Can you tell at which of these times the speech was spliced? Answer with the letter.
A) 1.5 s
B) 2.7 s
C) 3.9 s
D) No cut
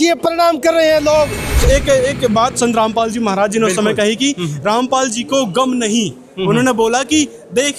A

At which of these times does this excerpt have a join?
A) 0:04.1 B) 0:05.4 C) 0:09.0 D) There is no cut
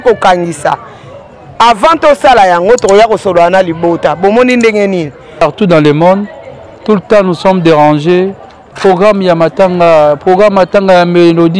B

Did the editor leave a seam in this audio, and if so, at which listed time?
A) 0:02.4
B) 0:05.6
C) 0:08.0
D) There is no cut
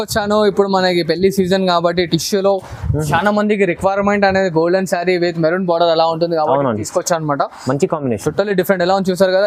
D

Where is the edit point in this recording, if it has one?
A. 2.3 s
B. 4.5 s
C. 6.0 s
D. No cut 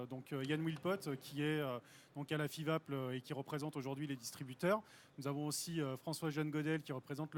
A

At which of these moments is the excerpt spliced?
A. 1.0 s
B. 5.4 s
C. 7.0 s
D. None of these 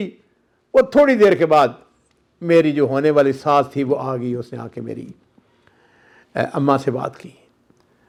D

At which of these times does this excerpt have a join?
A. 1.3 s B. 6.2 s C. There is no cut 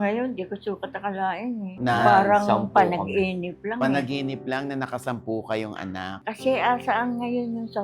B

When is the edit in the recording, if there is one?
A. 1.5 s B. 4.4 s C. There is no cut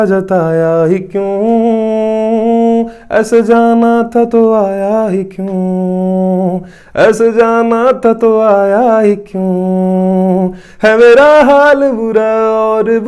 C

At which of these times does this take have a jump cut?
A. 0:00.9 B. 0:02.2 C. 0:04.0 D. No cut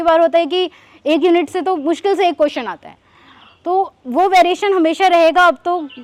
D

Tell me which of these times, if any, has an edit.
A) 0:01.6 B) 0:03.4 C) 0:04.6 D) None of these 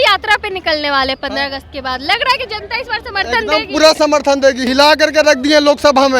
C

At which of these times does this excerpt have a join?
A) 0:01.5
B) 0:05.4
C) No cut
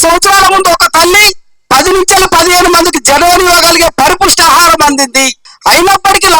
B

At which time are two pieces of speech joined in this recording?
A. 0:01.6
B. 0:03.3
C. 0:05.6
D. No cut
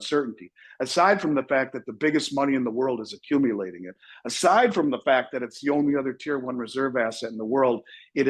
D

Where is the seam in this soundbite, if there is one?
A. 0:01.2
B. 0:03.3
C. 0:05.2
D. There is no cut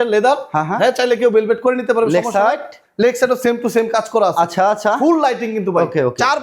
D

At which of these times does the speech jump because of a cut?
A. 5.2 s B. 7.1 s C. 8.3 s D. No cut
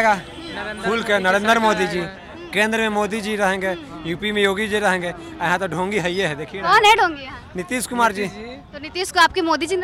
D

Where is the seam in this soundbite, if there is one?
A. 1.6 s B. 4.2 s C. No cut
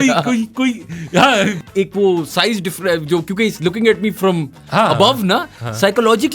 A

